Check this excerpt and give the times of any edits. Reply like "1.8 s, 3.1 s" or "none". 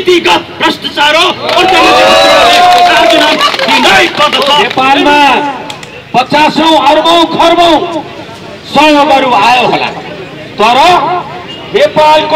4.7 s